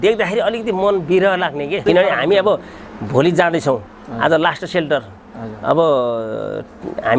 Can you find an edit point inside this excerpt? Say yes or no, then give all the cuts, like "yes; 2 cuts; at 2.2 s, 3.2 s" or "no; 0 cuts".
yes; 1 cut; at 1.8 s